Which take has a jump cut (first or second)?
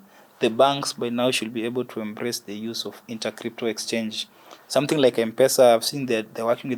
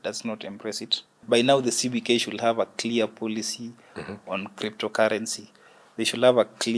second